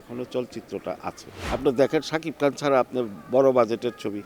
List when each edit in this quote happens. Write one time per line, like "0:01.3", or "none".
0:01.3